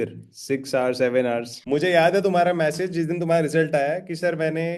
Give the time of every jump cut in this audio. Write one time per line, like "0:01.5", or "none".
0:01.5